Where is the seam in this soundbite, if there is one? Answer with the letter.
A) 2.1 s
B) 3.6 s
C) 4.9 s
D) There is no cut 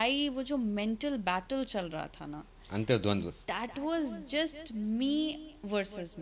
D